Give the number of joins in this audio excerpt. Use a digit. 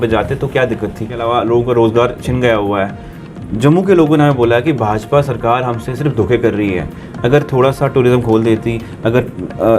1